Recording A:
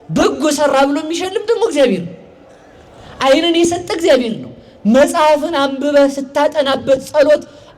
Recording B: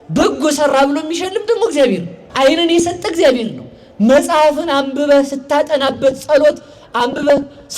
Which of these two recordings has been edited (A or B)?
B